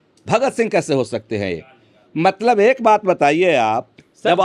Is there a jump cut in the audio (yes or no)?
no